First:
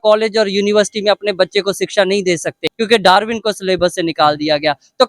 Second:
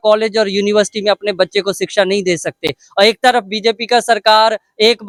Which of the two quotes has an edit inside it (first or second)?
first